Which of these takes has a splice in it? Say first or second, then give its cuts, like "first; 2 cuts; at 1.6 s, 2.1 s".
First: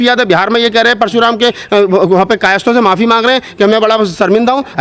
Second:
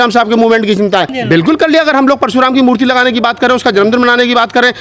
second; 1 cut; at 1.1 s